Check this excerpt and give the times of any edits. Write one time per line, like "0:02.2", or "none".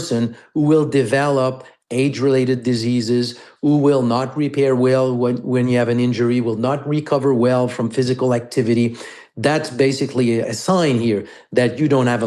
0:10.5